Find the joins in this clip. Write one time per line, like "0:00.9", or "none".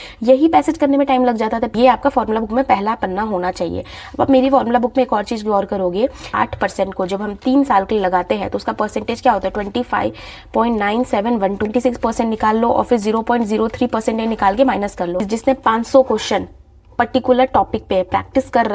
0:01.7
0:06.3
0:11.7
0:15.3